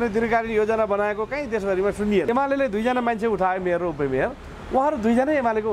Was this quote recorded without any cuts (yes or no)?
no